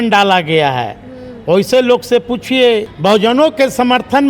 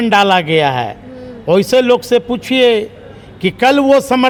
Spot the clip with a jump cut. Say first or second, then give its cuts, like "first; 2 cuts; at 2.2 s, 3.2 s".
first; 1 cut; at 2.9 s